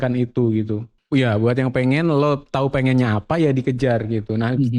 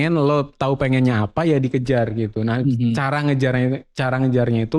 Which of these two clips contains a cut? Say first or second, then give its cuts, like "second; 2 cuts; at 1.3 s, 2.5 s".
first; 1 cut; at 0.9 s